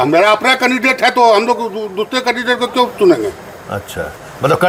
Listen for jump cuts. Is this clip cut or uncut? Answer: uncut